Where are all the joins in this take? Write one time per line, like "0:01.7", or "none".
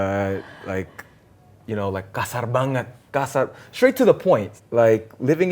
0:04.5